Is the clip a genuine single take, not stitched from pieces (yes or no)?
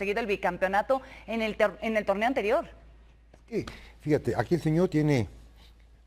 yes